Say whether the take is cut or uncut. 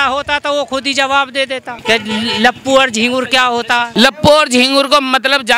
cut